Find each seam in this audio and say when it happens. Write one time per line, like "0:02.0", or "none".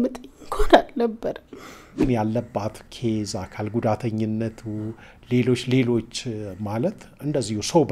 0:02.0